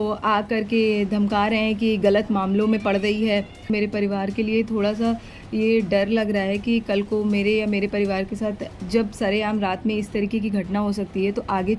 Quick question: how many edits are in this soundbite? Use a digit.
1